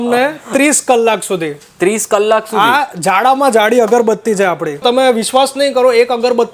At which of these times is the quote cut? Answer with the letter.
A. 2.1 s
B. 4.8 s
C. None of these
B